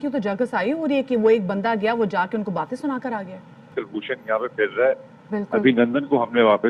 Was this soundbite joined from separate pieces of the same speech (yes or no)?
no